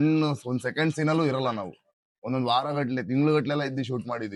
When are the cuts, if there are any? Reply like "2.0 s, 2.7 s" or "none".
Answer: none